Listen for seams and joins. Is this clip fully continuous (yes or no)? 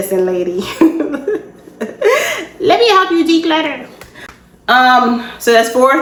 yes